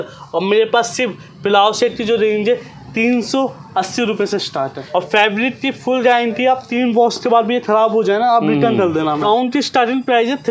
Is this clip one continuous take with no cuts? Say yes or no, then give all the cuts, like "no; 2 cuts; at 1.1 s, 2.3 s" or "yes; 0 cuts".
no; 2 cuts; at 4.8 s, 9.2 s